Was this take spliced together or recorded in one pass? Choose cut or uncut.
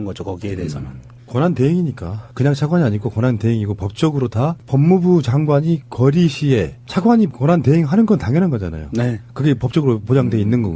cut